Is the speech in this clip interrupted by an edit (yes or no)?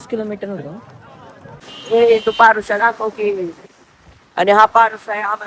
yes